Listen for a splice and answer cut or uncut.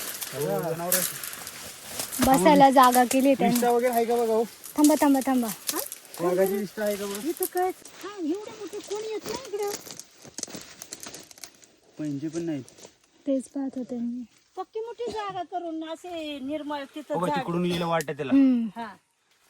cut